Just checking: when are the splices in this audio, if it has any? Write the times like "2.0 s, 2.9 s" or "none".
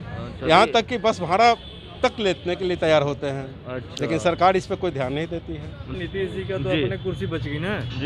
5.9 s